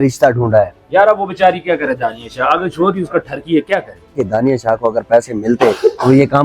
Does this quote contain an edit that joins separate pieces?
yes; 1 cut; at 4.1 s

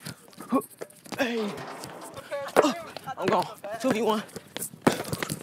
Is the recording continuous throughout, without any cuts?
no; 1 cut; at 2.1 s

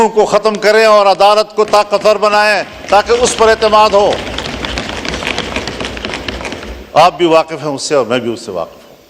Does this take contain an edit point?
no; 0 cuts

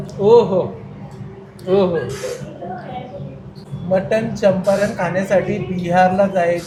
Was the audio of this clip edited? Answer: no; 0 cuts

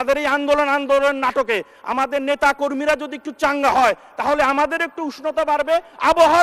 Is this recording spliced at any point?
no; 0 cuts

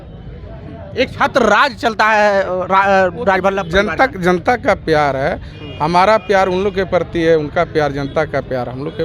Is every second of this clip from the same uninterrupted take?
yes; 0 cuts

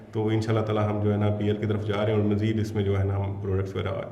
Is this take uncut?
yes; 0 cuts

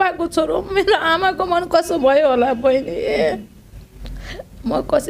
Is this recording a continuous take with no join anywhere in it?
yes; 0 cuts

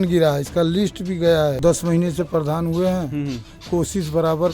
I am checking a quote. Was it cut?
yes; 1 cut; at 1.6 s

